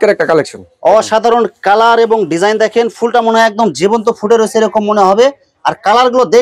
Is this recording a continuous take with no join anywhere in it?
yes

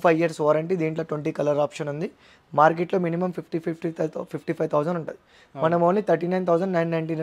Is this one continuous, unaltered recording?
yes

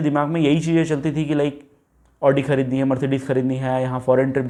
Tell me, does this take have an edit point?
no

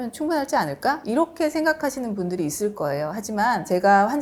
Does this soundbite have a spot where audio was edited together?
no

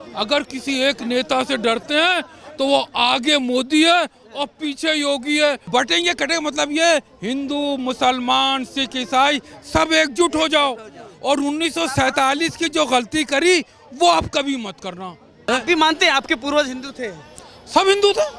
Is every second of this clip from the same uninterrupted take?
no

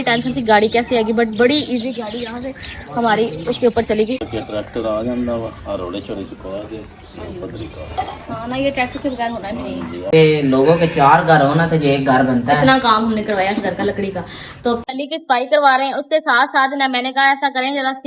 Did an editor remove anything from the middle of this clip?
yes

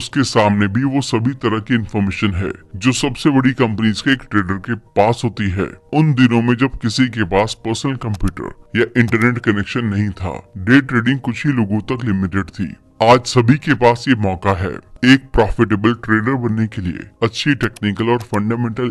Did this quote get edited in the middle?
no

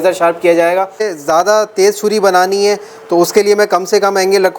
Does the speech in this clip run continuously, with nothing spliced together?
no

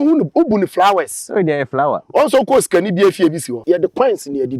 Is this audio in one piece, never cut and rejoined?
no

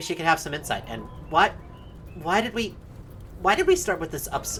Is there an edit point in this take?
no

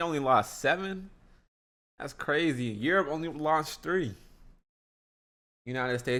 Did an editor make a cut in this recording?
no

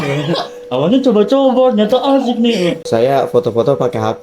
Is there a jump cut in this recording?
yes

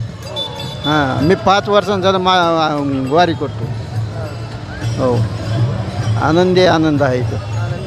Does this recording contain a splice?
no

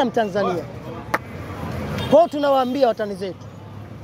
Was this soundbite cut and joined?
yes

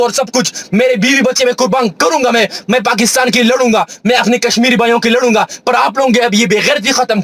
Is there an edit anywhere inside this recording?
no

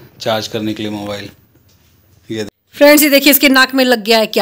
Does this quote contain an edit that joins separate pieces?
yes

